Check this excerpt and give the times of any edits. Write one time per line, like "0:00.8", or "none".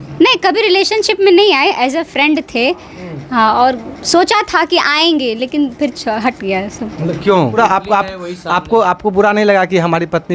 0:07.6